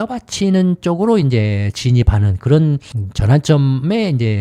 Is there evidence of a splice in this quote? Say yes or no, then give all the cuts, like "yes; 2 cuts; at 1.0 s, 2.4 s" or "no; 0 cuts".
yes; 1 cut; at 2.9 s